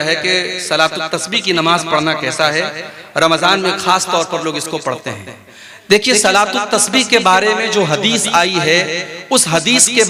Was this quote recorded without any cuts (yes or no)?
yes